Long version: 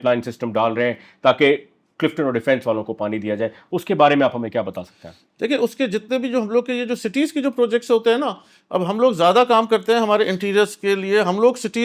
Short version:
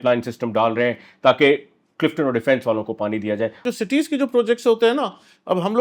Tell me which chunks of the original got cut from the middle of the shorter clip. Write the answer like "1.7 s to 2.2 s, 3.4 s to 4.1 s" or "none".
3.6 s to 6.8 s